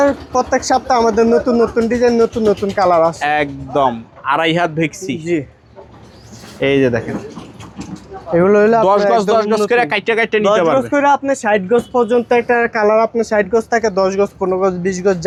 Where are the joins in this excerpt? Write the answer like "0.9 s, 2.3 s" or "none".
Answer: none